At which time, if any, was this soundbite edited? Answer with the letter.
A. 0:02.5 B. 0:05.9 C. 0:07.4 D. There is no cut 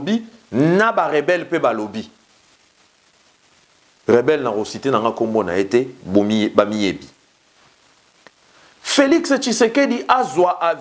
C